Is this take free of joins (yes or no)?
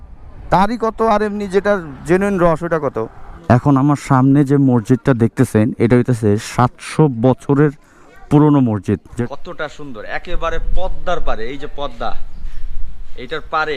no